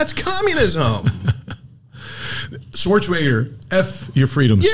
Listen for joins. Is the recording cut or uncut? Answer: uncut